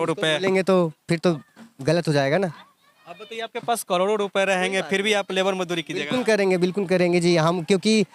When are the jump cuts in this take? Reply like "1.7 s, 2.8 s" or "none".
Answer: none